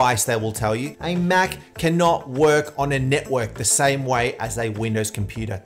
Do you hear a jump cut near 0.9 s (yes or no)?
yes